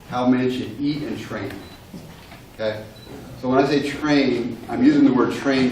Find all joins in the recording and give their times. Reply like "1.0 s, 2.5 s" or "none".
2.5 s